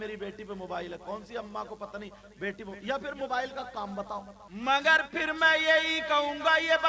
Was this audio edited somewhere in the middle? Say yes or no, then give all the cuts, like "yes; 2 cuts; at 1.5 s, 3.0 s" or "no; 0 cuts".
yes; 1 cut; at 4.4 s